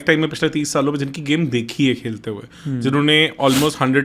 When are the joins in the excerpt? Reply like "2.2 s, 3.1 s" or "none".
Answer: none